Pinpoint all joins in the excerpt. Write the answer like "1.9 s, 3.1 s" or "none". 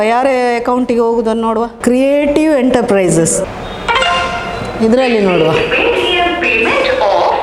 none

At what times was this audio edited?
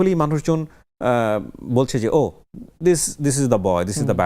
none

